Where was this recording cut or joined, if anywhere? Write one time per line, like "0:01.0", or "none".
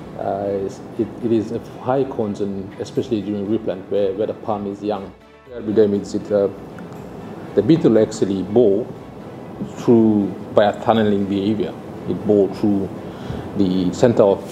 0:05.6